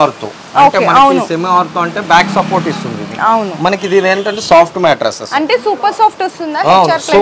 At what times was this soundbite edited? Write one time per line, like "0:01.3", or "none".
none